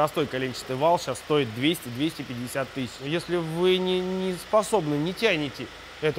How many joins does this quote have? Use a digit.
1